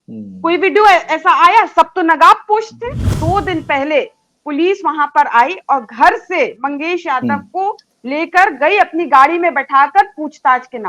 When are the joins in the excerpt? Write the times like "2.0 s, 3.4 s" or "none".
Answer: 3.1 s